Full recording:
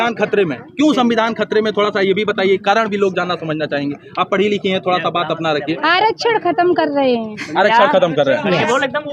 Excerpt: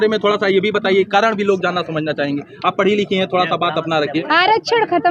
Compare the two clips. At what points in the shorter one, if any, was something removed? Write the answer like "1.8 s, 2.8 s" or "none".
none